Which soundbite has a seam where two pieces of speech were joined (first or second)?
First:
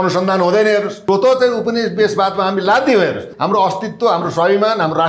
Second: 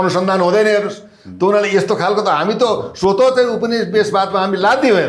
first